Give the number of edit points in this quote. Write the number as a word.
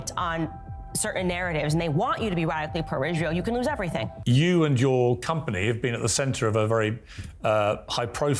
one